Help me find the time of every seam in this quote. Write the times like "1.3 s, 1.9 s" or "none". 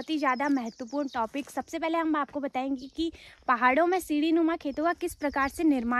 none